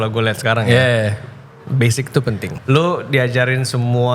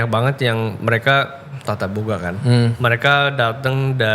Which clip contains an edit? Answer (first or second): first